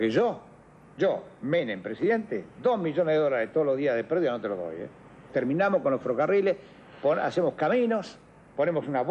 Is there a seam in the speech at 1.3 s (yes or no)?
no